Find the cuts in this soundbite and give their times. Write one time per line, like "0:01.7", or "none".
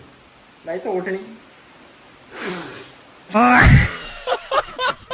0:03.3